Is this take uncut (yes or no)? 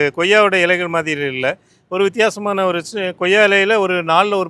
yes